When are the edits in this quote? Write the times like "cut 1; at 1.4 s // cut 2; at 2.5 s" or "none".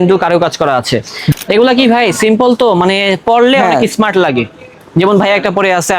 cut 1; at 1.3 s

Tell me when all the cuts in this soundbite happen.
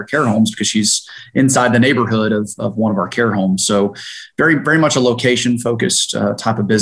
none

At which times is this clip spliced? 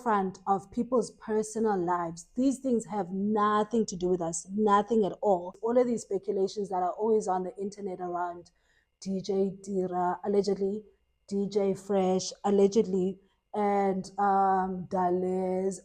cut 1; at 5.6 s

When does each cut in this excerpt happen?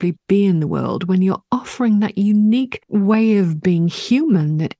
cut 1; at 2.8 s

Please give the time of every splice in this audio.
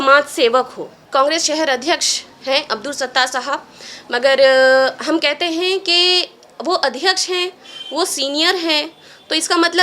cut 1; at 1.0 s

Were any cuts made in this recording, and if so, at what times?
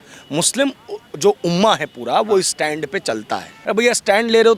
cut 1; at 3.5 s

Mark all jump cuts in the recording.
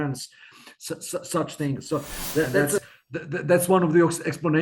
cut 1; at 2.8 s

